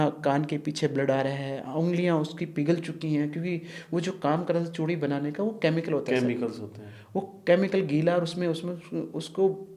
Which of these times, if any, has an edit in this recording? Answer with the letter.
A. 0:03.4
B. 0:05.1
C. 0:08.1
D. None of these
D